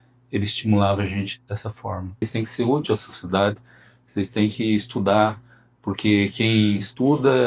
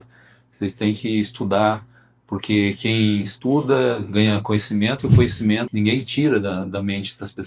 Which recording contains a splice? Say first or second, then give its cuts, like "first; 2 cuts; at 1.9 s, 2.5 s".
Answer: first; 1 cut; at 2.2 s